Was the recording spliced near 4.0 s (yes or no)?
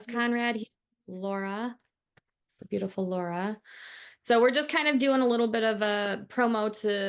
no